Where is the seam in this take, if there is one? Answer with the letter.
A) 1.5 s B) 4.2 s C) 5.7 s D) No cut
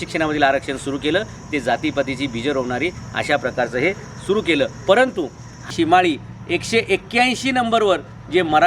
C